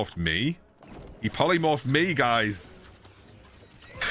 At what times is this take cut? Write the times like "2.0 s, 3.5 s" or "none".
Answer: none